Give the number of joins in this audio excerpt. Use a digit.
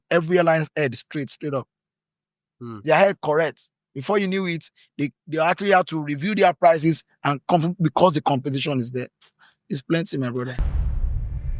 1